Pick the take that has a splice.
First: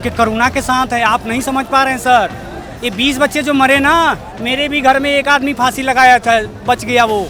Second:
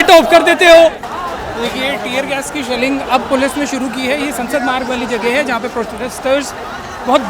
second; 1 cut; at 1.1 s

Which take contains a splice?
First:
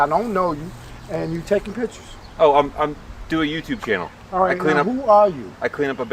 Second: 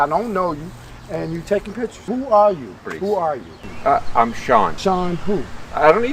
second; 3 cuts; at 2.1 s, 2.9 s, 4.8 s

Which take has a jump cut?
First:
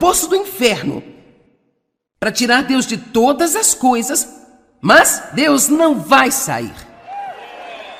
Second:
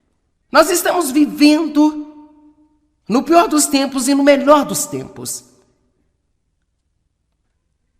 second; 1 cut; at 4.8 s

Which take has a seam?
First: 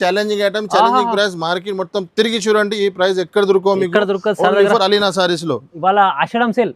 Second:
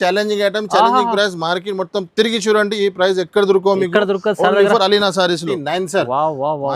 second; 1 cut; at 5.5 s

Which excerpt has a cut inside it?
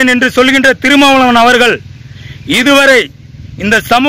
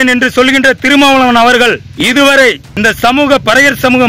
second; 2 cuts; at 1.9 s, 2.7 s

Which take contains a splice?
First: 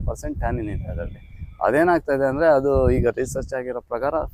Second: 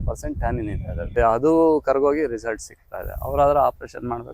second; 1 cut; at 1.2 s

